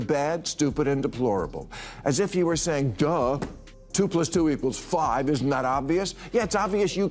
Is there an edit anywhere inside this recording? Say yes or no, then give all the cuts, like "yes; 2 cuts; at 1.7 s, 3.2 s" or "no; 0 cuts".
no; 0 cuts